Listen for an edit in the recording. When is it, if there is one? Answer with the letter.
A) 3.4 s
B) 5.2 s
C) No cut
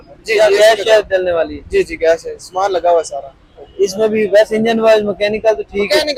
C